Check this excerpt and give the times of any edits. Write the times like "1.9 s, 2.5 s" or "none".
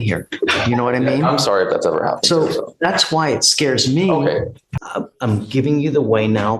4.7 s